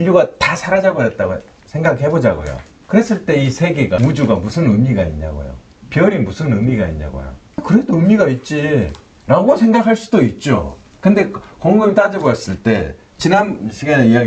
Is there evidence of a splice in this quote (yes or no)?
no